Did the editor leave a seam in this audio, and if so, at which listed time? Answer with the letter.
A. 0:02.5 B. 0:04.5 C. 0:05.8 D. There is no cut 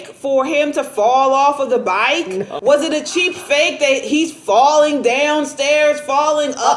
A